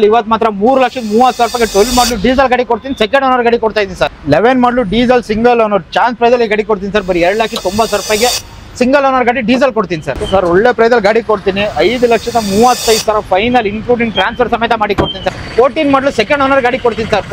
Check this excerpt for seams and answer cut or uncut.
cut